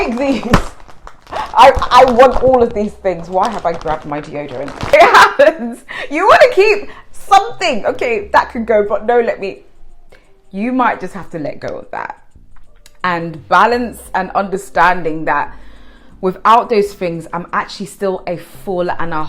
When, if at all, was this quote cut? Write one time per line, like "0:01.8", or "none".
none